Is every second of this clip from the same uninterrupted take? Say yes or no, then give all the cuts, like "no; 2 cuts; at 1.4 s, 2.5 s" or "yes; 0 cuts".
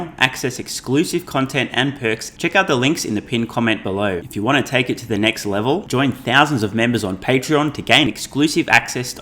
no; 2 cuts; at 2.3 s, 4.2 s